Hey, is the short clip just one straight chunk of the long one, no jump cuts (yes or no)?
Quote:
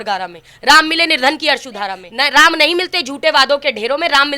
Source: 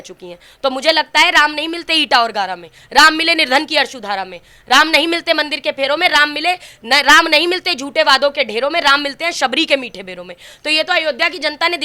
no